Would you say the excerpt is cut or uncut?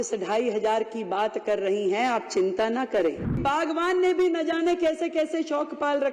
cut